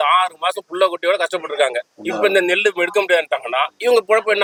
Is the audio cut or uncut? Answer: uncut